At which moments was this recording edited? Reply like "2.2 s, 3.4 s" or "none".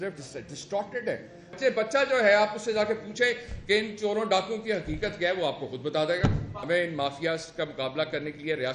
1.6 s, 6.6 s